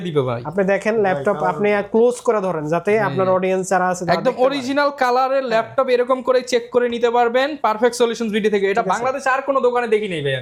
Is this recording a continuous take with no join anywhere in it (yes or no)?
yes